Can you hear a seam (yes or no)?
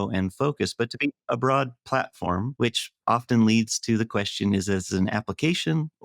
yes